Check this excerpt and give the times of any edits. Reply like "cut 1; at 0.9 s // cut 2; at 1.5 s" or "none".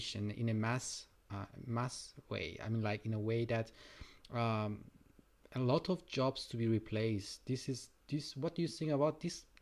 none